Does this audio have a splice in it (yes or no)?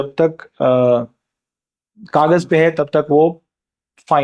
no